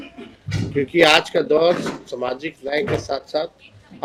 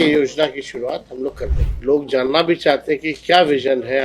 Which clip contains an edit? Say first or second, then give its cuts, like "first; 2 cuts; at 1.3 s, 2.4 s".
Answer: second; 1 cut; at 1.7 s